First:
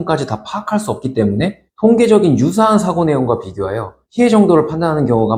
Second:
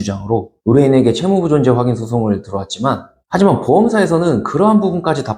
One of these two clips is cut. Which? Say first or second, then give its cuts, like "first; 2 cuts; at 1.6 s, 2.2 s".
second; 1 cut; at 3.1 s